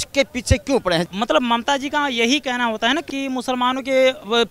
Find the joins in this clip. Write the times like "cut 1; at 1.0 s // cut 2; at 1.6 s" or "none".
cut 1; at 1.1 s // cut 2; at 3.1 s